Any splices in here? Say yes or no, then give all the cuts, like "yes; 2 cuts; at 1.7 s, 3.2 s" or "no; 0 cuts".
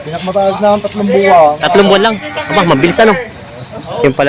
no; 0 cuts